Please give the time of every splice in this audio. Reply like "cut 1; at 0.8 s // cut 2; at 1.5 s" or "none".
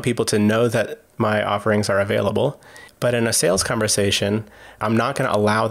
cut 1; at 1.0 s // cut 2; at 4.7 s